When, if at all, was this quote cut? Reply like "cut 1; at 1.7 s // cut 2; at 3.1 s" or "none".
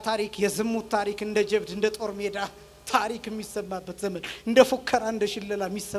none